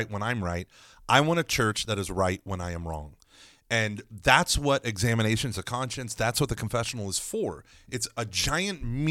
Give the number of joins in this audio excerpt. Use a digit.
0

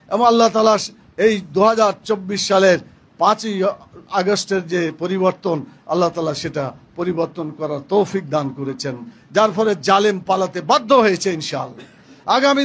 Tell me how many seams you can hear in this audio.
1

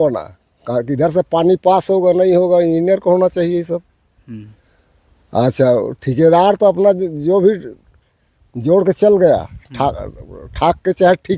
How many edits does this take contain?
0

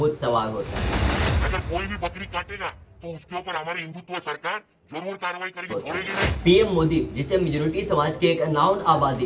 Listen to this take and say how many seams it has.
1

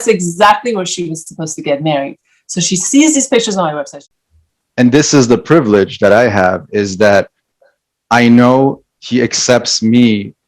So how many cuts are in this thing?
1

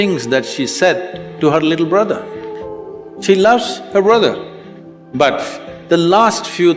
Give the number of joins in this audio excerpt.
0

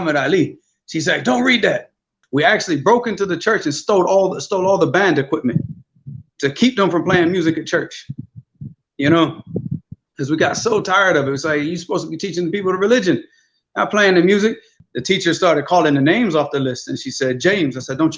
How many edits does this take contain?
2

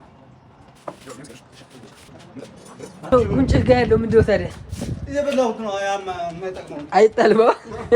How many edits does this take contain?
1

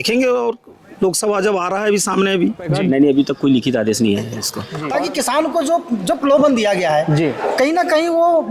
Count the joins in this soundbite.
2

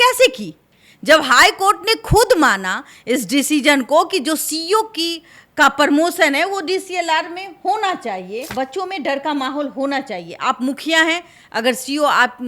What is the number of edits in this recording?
1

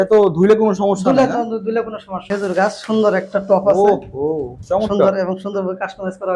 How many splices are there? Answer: 1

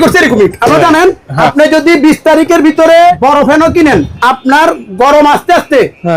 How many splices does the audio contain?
3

